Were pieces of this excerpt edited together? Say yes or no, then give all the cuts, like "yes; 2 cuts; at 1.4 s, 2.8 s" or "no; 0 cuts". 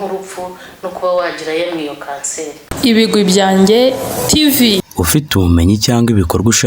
yes; 1 cut; at 2.6 s